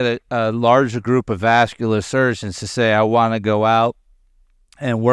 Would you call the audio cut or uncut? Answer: uncut